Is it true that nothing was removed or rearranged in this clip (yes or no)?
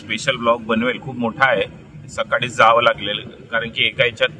yes